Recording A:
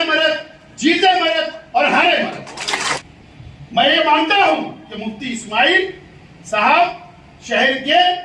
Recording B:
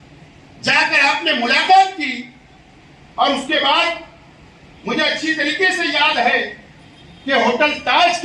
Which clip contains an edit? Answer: A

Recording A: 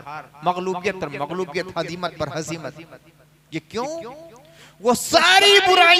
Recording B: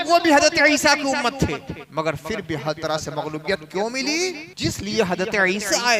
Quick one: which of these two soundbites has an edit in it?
B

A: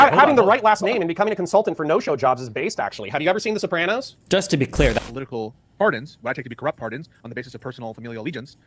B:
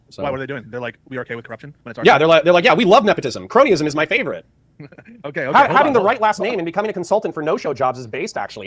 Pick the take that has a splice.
A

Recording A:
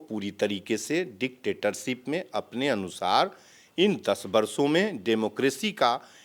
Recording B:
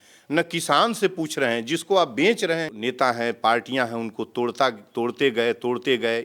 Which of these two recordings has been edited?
B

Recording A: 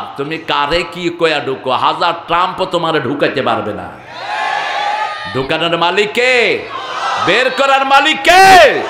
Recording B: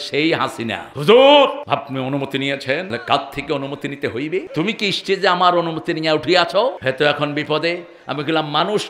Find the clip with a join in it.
B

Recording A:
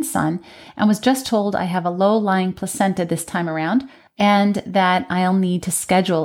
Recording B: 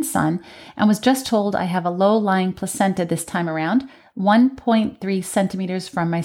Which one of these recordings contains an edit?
A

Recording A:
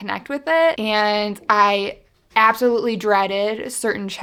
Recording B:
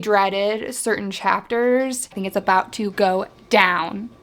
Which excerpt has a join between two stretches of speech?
B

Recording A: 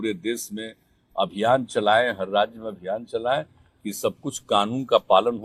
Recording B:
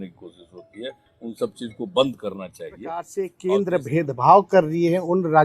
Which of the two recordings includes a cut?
B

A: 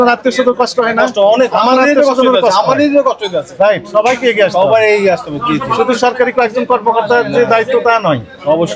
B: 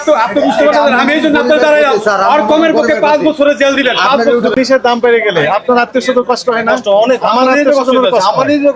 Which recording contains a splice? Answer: B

